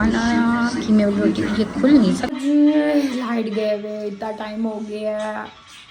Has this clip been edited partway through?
yes; 1 cut; at 2.3 s

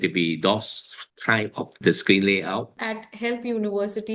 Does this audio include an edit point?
yes; 1 cut; at 2.7 s

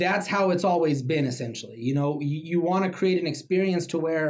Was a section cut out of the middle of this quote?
no; 0 cuts

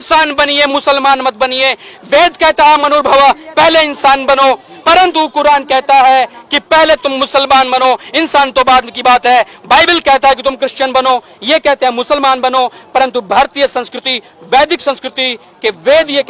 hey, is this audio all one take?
yes; 0 cuts

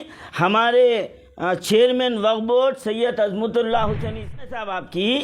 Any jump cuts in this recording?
yes; 1 cut; at 4.3 s

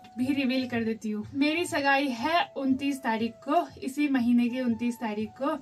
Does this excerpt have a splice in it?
no; 0 cuts

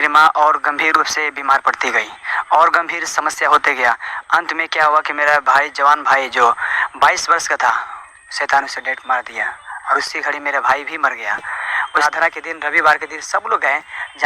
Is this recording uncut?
no; 1 cut; at 12.0 s

